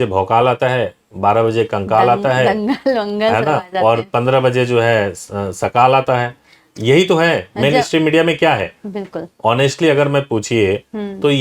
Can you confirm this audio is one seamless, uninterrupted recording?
yes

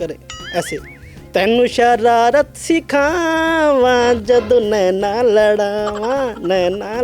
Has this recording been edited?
no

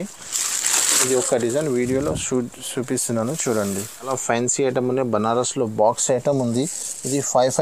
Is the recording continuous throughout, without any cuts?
no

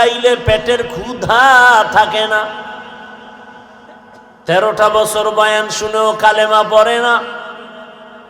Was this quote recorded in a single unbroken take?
no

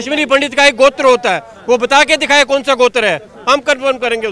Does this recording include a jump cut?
no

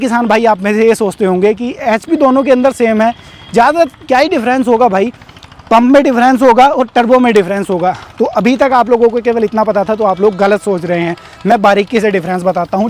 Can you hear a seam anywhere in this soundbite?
no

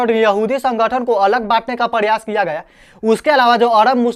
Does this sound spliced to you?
no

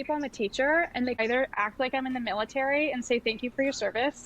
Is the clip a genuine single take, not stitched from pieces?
no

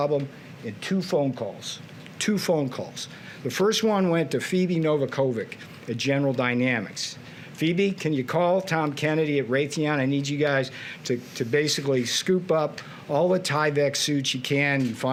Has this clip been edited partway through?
no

